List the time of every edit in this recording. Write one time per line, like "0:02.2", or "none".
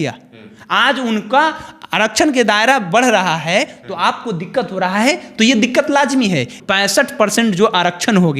0:06.6

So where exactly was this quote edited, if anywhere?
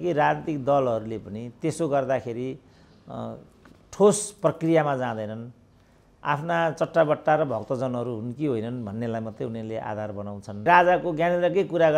0:10.6

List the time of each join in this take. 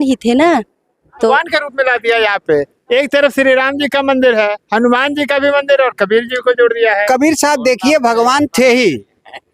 0:01.3

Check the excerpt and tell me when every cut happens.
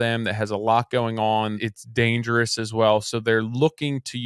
0:01.6

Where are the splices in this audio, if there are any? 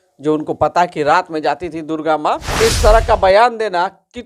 0:02.5

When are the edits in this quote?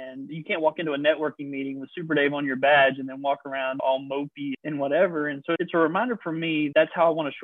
none

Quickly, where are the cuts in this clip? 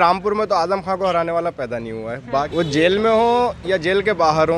0:02.5

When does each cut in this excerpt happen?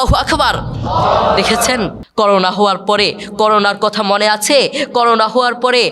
0:02.0

